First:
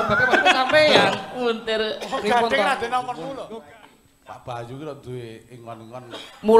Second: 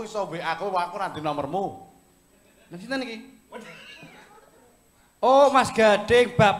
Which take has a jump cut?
first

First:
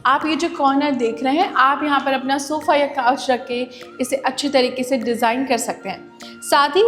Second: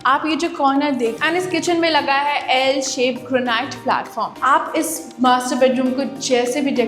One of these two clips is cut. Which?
second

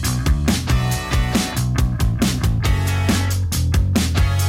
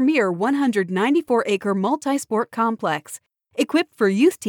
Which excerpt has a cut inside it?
first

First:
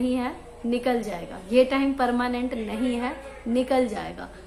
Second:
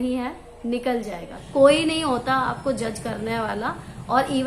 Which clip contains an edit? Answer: second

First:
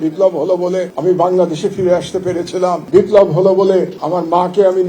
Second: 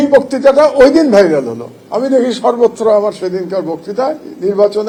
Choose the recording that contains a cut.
first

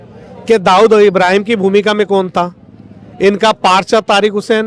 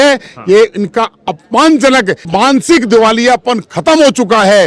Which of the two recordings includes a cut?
second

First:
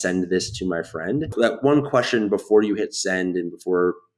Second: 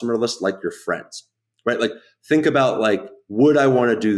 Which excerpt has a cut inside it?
first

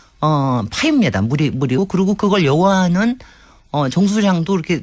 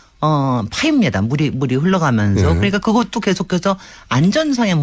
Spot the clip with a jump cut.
second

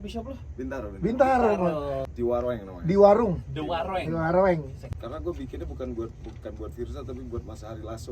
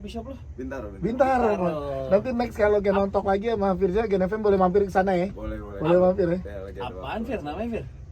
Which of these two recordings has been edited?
first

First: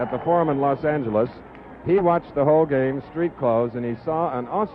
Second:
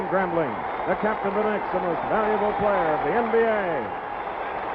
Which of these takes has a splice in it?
first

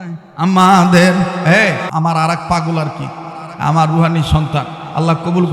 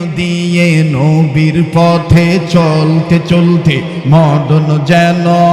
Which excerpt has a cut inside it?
first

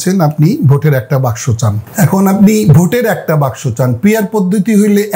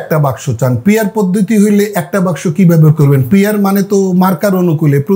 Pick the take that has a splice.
first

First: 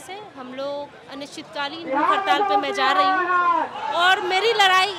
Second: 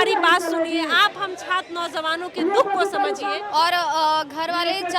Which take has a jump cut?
second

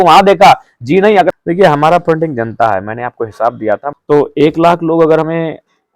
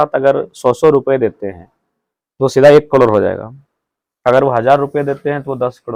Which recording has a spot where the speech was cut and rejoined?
first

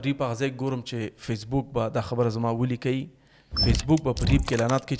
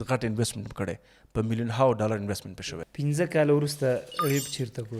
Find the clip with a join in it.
second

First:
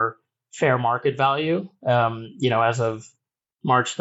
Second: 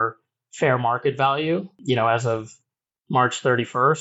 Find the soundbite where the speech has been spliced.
second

